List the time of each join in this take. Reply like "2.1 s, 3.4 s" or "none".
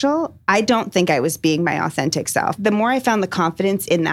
2.6 s

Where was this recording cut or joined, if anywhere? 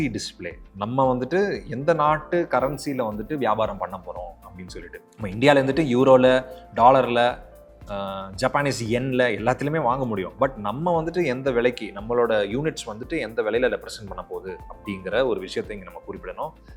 none

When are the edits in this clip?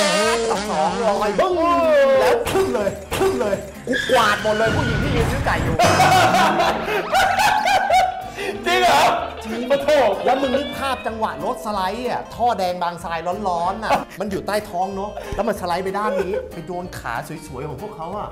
none

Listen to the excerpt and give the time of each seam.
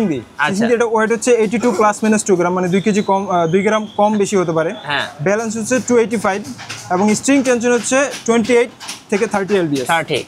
none

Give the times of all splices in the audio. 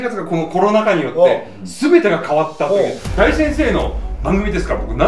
3.0 s

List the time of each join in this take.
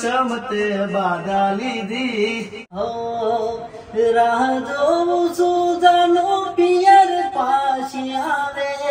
2.6 s

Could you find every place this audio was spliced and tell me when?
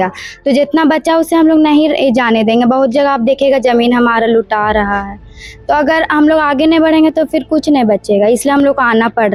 none

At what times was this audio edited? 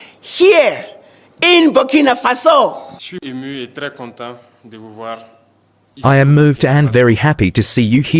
3.0 s

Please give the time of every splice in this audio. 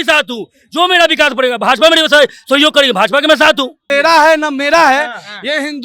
3.8 s

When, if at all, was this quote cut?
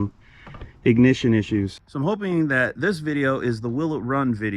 1.8 s

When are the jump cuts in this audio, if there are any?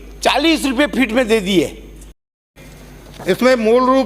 2.2 s

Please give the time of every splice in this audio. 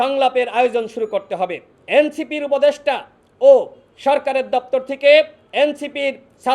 1.7 s

